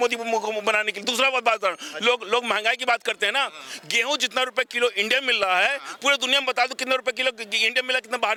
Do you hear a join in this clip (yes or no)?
no